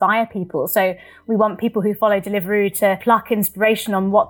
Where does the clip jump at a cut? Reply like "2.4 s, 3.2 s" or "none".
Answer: 3.0 s

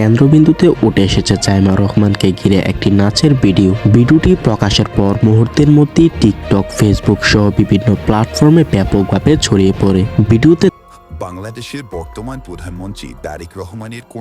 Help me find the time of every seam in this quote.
10.7 s

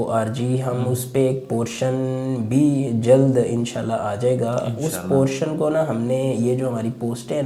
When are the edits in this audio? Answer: none

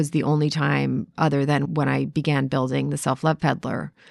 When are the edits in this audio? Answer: 1.6 s

